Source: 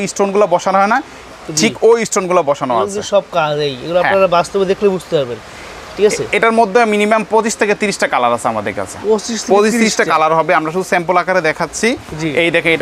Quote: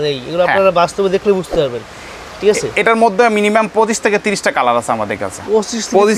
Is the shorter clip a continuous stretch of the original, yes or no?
yes